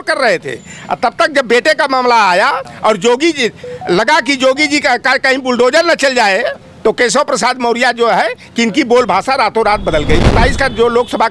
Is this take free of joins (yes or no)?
no